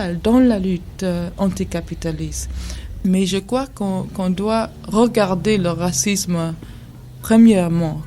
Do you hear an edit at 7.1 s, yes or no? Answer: yes